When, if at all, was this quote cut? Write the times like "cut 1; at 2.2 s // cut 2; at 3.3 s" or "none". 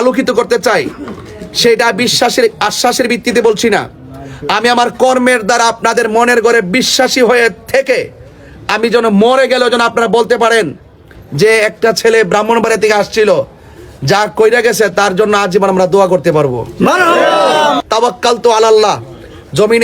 cut 1; at 17.8 s